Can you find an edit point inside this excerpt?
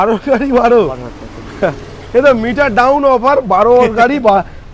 no; 0 cuts

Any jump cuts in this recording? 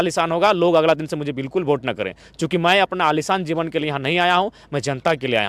no; 0 cuts

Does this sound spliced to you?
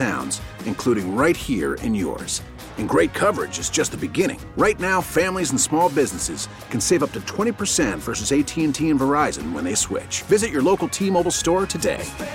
no; 0 cuts

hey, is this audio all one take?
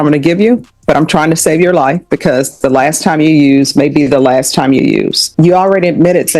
no; 1 cut; at 5.2 s

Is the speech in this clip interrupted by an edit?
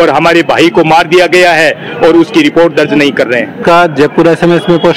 yes; 1 cut; at 3.6 s

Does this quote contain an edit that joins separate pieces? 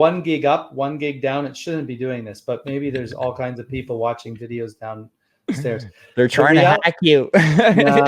no; 0 cuts

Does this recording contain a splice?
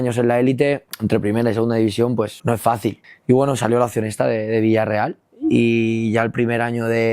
yes; 2 cuts; at 0.9 s, 2.7 s

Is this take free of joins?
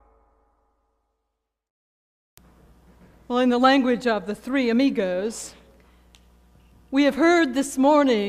yes; 0 cuts

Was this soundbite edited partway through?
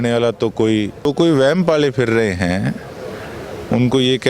yes; 1 cut; at 1.1 s

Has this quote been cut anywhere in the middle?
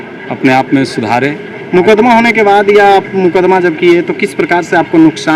no; 0 cuts

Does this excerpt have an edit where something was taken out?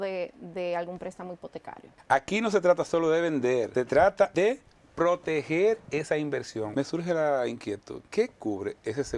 yes; 5 cuts; at 1.9 s, 3.7 s, 4.3 s, 6.7 s, 8.0 s

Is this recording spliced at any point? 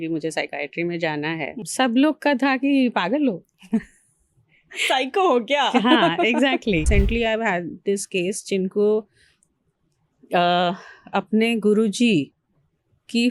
yes; 2 cuts; at 1.6 s, 6.9 s

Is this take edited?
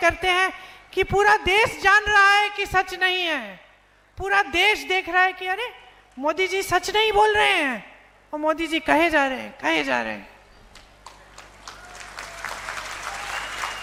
no; 0 cuts

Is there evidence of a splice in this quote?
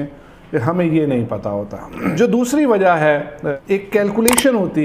yes; 2 cuts; at 2.1 s, 3.4 s

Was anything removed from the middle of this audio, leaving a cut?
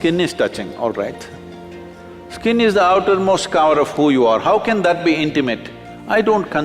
no; 0 cuts

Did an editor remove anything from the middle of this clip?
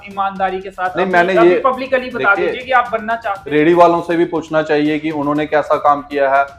yes; 1 cut; at 3.3 s

